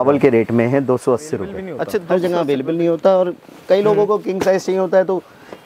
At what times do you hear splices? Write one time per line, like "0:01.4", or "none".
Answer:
0:01.9